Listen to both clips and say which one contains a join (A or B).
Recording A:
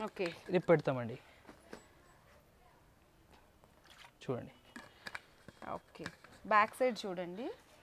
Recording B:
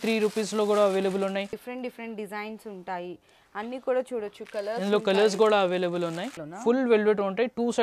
B